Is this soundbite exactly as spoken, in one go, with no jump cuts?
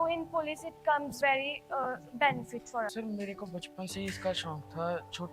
no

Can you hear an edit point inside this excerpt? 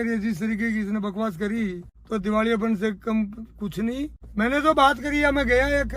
yes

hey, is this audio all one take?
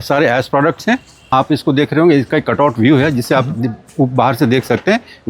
no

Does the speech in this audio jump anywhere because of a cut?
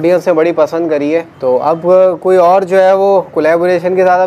yes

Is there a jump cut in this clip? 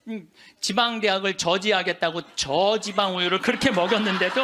no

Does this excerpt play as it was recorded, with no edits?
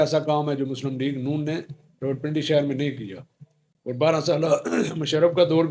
yes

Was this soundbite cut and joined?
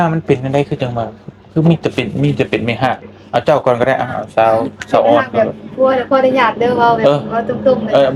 no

